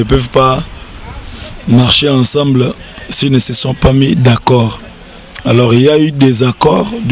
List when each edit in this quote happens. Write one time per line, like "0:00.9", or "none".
none